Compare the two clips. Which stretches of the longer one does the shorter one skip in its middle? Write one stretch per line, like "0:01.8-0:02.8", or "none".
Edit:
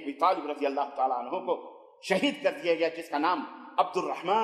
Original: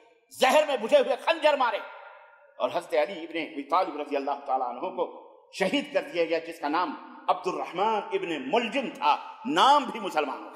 none